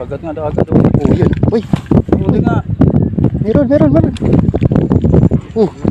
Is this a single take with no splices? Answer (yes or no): yes